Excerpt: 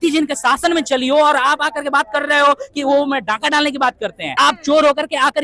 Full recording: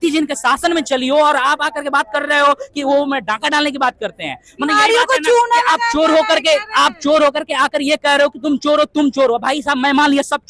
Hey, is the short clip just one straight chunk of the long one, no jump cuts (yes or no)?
no